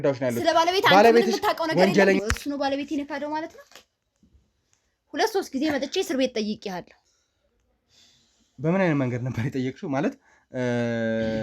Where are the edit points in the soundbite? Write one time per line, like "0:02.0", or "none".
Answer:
0:02.2